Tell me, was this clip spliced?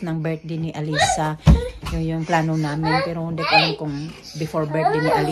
no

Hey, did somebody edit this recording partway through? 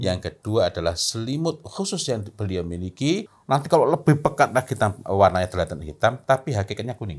yes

